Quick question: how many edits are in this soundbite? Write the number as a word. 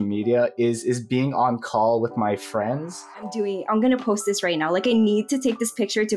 one